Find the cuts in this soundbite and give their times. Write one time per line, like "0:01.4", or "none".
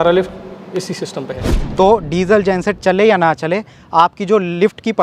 0:01.5

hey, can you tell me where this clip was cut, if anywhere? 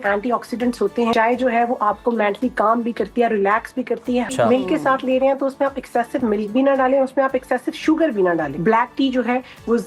0:01.1
0:04.3
0:08.5

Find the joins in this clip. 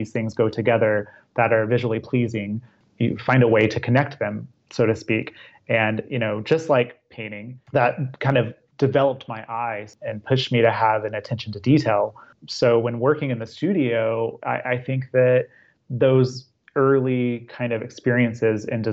0:09.9

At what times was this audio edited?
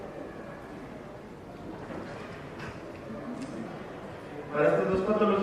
0:01.7

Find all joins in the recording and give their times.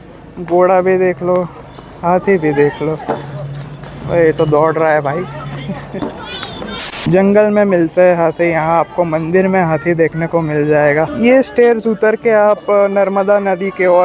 none

